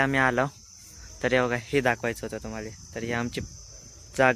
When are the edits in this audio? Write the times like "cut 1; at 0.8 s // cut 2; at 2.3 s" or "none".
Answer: none